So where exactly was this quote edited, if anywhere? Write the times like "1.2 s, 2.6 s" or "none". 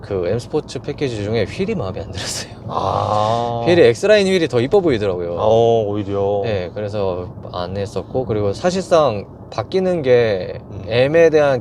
none

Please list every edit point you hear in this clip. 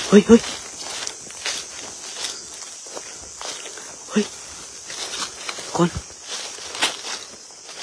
none

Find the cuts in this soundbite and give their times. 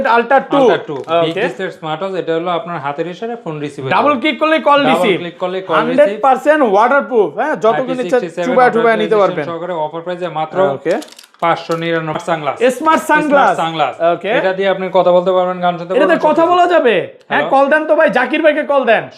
12.2 s

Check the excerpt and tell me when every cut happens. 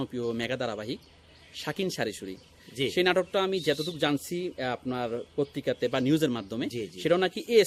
none

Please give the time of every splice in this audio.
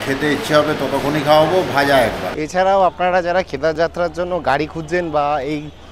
2.3 s

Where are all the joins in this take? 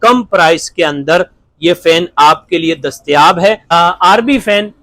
3.7 s

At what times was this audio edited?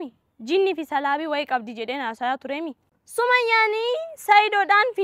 2.8 s

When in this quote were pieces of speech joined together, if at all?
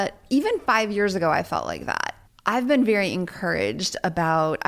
2.1 s

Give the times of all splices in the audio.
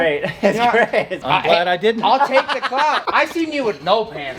1.2 s, 3.0 s

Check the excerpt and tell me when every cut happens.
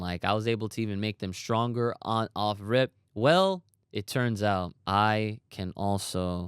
4.8 s

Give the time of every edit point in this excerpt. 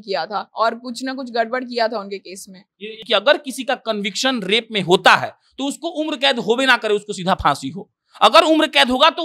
3.0 s

